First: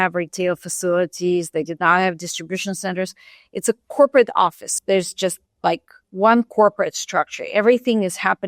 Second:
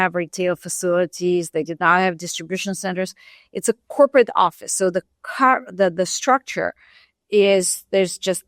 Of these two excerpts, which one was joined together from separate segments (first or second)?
first